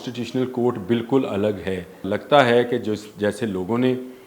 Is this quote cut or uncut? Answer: cut